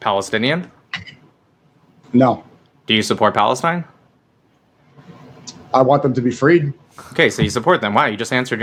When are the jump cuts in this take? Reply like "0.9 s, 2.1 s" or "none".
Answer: none